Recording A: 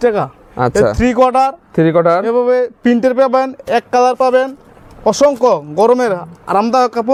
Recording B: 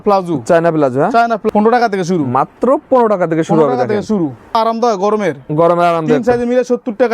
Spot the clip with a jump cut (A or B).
B